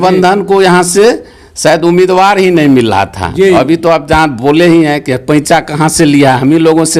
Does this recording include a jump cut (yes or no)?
no